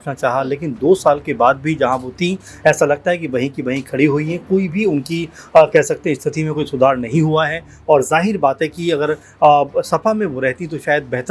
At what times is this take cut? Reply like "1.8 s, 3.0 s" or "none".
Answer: none

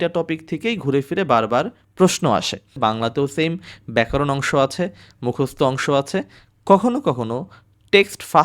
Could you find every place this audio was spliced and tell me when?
2.7 s

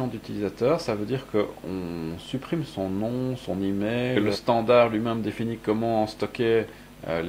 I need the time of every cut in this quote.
4.1 s

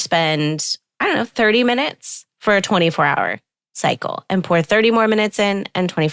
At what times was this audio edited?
none

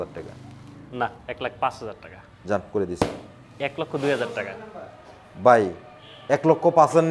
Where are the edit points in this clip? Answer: none

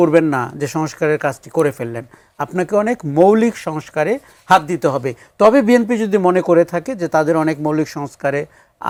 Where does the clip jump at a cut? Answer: none

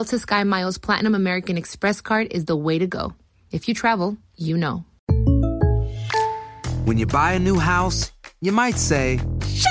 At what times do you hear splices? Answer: 4.9 s

